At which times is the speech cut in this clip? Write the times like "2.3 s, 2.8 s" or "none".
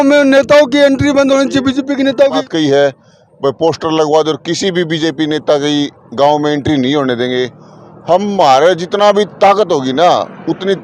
2.4 s